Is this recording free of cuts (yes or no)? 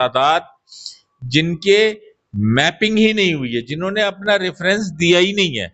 yes